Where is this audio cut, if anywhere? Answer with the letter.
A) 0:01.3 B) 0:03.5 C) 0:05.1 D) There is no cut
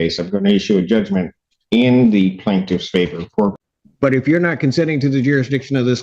B